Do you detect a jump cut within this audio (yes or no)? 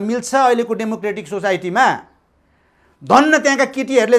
no